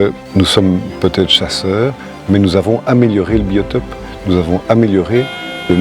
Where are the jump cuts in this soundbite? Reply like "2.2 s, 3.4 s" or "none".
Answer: none